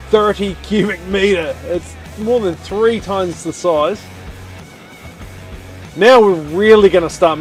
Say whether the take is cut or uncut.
uncut